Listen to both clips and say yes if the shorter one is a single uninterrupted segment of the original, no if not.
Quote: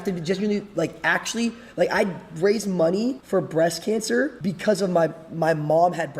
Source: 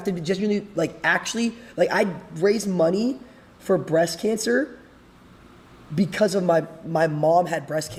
no